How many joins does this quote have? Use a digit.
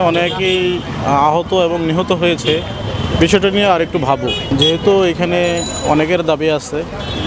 0